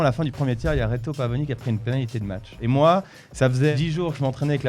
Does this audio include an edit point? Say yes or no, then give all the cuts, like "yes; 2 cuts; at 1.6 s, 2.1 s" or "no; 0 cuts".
yes; 2 cuts; at 2.5 s, 3.7 s